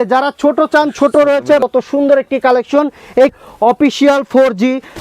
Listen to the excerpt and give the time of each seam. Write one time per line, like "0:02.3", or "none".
0:01.6
0:03.3